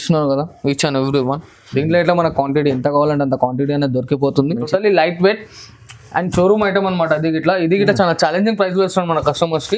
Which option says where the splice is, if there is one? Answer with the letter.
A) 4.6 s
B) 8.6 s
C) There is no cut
A